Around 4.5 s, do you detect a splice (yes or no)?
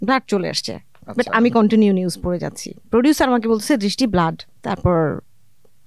yes